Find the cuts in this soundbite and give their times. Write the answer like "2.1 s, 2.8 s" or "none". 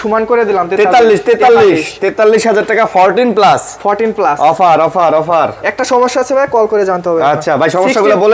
none